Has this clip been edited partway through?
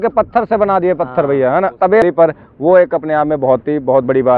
yes; 1 cut; at 2.0 s

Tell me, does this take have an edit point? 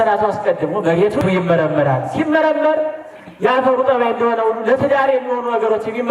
yes; 1 cut; at 1.2 s

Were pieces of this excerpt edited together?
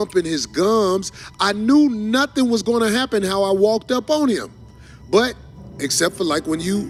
no; 0 cuts

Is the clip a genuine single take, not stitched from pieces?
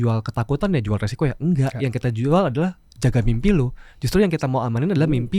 yes; 0 cuts

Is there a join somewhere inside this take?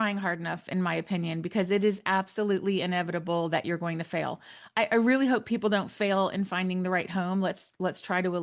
no; 0 cuts

